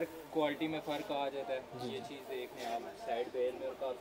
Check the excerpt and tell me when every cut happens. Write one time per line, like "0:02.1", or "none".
none